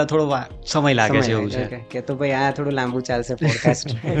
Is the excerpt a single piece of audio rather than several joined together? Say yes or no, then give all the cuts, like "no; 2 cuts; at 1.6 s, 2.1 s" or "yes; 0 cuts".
no; 1 cut; at 1.9 s